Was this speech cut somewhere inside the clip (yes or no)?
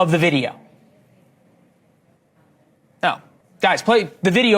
yes